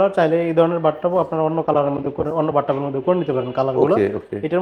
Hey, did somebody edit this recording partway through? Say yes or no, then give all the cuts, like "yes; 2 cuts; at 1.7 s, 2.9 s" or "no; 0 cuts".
no; 0 cuts